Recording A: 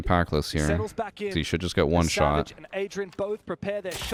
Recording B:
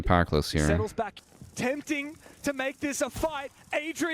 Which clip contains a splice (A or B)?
B